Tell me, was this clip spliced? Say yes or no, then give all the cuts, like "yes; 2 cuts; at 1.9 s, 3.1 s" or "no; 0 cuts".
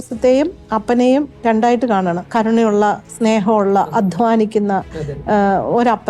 yes; 1 cut; at 2.3 s